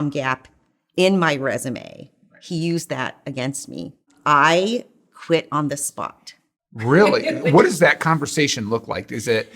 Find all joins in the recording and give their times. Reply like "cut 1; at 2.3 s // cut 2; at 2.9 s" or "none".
cut 1; at 4.1 s